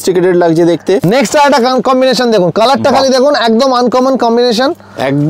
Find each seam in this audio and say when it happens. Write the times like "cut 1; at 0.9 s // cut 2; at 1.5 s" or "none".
cut 1; at 1.0 s